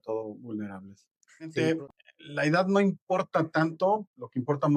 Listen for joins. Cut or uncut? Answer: cut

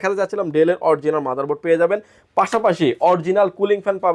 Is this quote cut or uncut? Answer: uncut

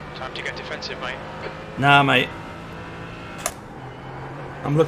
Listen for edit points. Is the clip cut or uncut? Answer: cut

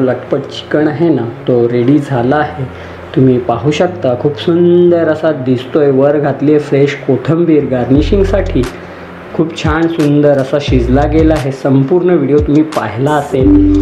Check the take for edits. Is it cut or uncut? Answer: uncut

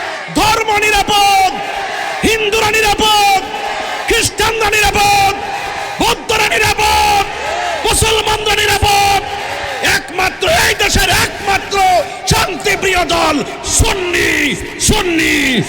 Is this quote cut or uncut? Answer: uncut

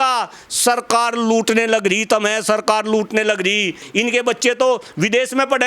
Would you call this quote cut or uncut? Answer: cut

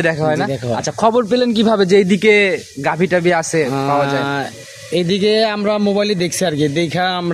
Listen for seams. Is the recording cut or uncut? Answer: uncut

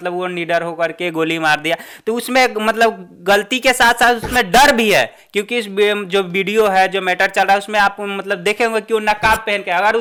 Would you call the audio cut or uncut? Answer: uncut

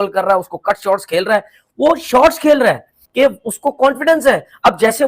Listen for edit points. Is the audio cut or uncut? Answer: cut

